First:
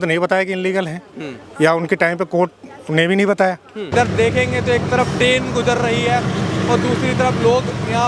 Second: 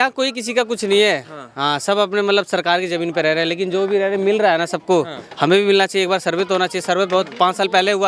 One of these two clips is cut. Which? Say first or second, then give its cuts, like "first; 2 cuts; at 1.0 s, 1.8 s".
first; 1 cut; at 3.9 s